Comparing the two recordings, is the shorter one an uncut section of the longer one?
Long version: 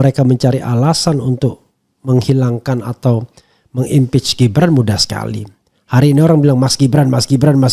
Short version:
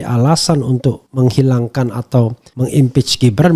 no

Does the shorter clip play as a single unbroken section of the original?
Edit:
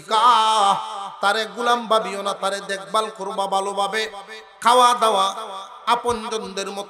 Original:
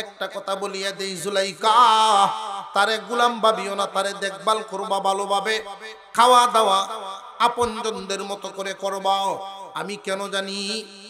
yes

